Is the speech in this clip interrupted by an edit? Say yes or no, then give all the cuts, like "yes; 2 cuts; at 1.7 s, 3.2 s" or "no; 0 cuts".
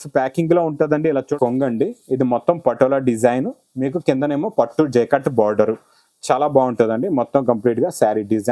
yes; 1 cut; at 1.3 s